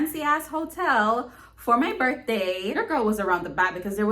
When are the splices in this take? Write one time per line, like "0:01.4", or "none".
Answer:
0:02.8